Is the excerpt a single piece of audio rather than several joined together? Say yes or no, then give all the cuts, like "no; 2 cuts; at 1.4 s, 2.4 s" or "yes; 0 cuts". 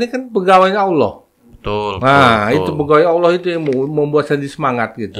yes; 0 cuts